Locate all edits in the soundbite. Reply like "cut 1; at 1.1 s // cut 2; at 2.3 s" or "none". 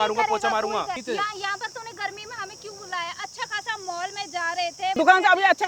cut 1; at 0.9 s // cut 2; at 5.0 s

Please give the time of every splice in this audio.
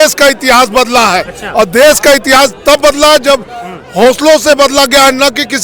none

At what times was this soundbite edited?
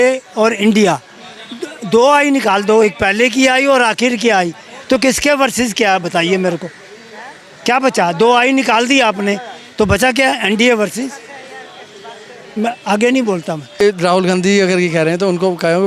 cut 1; at 13.8 s

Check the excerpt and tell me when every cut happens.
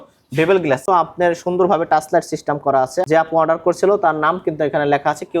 cut 1; at 0.8 s // cut 2; at 3.1 s

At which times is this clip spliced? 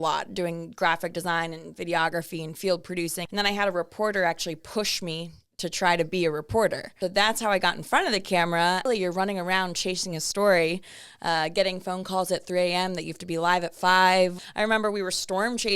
cut 1; at 3.2 s // cut 2; at 6.9 s // cut 3; at 8.9 s // cut 4; at 14.4 s

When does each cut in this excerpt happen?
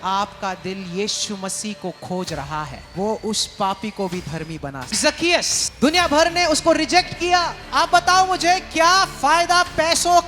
cut 1; at 2.8 s // cut 2; at 5.1 s // cut 3; at 7.6 s

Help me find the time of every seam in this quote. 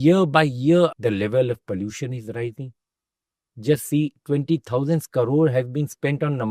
cut 1; at 1.0 s

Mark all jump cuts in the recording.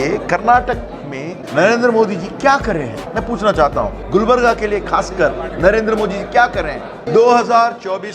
cut 1; at 1.4 s // cut 2; at 3.0 s // cut 3; at 4.0 s // cut 4; at 5.5 s // cut 5; at 6.9 s

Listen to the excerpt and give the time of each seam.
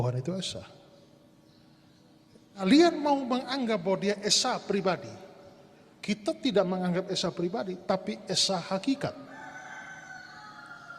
cut 1; at 2.7 s

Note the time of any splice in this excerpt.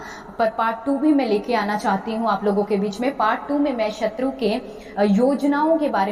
none

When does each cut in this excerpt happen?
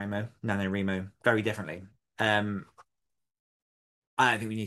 cut 1; at 2.0 s

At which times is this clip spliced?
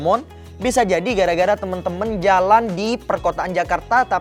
none

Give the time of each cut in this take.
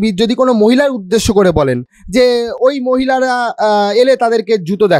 none

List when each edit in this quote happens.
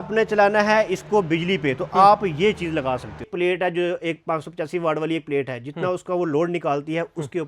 cut 1; at 3.3 s

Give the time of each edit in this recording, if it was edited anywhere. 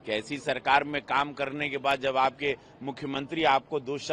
none

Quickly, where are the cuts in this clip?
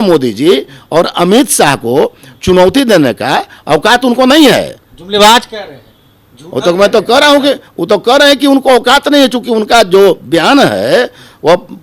none

